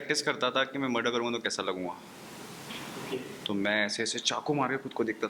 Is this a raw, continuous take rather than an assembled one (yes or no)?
yes